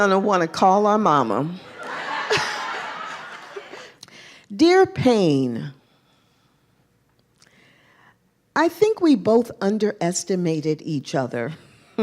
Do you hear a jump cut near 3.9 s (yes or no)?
yes